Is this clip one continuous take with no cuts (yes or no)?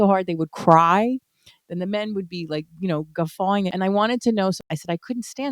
no